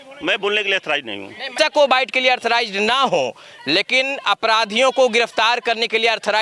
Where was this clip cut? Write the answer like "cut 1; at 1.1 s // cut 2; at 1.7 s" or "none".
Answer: cut 1; at 1.6 s